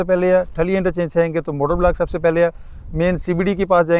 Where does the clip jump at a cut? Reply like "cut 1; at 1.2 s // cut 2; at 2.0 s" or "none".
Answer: none